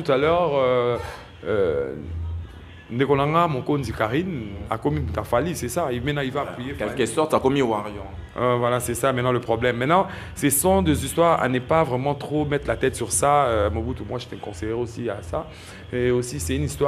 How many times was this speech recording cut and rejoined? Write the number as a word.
zero